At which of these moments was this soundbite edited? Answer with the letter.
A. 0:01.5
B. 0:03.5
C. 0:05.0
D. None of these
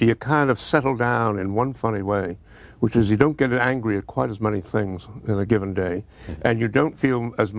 B